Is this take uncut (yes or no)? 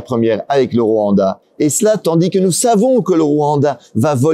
no